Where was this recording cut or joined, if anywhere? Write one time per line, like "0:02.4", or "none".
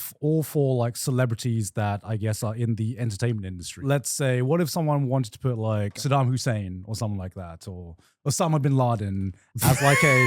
0:03.7
0:06.0